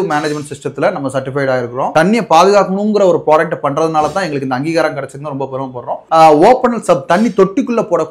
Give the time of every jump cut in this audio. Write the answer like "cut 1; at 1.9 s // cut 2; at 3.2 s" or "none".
cut 1; at 1.9 s // cut 2; at 6.0 s